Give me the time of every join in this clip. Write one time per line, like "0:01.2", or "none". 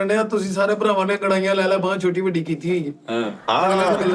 none